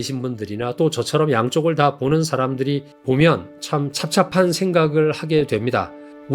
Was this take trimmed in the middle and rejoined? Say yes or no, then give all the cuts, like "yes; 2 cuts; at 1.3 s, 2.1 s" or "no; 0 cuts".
yes; 1 cut; at 2.9 s